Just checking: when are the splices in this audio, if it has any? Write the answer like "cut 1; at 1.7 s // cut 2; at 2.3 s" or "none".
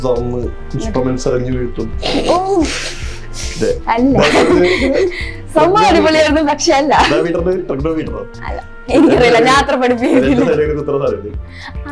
none